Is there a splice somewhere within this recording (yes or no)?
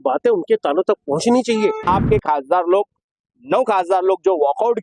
yes